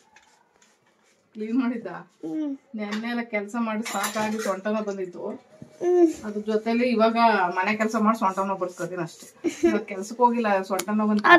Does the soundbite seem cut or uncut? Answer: uncut